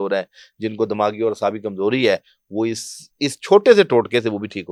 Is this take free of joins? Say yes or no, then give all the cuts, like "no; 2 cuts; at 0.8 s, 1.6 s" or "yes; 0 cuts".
yes; 0 cuts